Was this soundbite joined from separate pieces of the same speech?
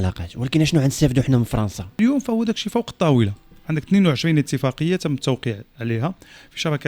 yes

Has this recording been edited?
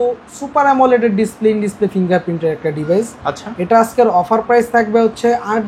no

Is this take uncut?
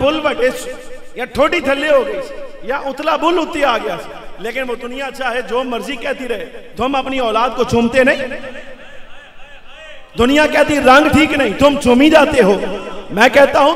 yes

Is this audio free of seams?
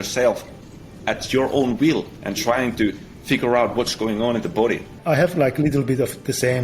no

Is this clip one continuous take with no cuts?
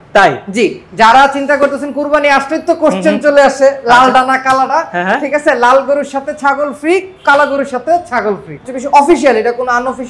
no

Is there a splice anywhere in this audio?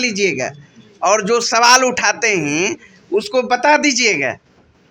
no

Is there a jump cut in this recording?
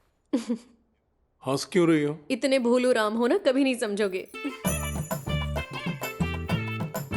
yes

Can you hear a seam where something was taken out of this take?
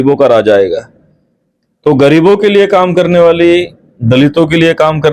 no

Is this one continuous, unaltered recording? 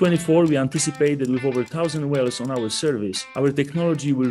no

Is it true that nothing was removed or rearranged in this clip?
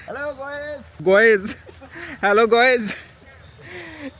yes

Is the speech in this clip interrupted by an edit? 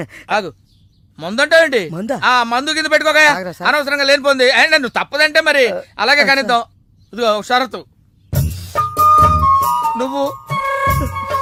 no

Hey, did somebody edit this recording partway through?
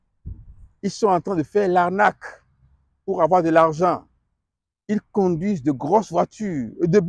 no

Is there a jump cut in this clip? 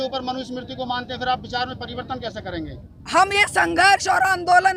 no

